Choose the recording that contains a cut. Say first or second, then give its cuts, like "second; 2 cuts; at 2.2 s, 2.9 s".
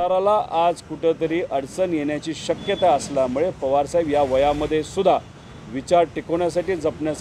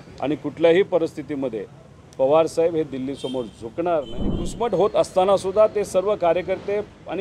second; 1 cut; at 4.5 s